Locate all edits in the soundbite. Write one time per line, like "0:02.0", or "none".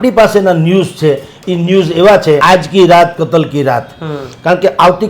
0:02.4